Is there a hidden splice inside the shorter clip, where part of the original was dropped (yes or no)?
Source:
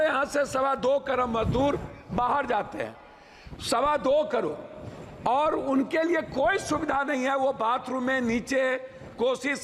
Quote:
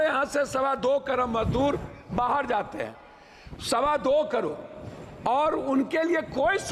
no